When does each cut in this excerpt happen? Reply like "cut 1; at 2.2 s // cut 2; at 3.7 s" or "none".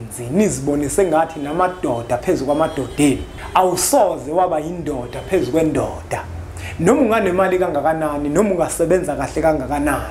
cut 1; at 3.3 s